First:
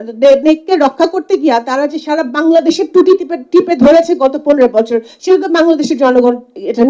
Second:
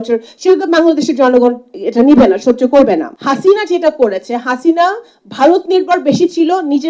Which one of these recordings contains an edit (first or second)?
second